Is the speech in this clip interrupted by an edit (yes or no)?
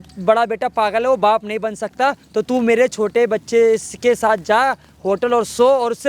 no